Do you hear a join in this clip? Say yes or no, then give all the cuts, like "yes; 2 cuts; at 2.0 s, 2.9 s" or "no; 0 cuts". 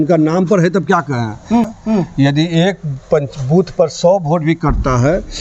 yes; 1 cut; at 1.7 s